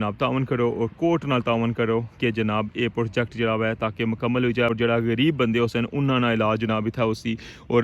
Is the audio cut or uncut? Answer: cut